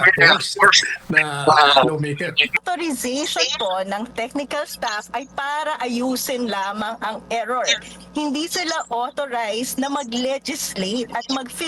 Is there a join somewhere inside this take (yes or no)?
yes